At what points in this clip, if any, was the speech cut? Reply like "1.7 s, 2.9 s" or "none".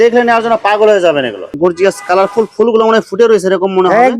1.6 s